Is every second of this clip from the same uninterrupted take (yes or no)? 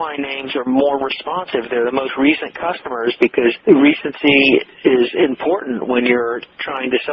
yes